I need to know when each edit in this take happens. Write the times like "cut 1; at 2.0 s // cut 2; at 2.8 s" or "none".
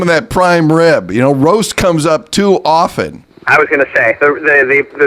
none